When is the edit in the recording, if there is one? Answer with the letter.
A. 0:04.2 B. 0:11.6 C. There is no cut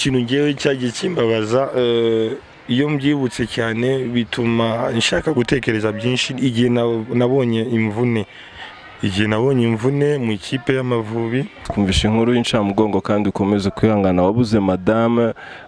B